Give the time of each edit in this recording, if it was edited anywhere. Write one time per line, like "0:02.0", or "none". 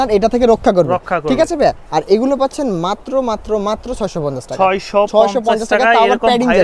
none